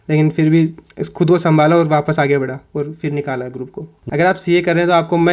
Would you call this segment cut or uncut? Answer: cut